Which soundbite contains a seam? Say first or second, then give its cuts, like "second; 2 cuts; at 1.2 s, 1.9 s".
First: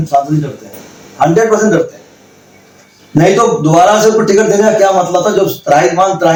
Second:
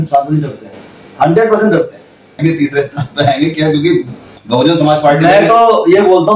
second; 1 cut; at 2.4 s